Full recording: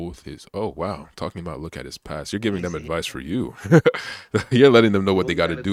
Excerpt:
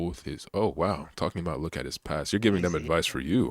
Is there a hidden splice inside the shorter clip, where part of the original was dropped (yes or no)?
no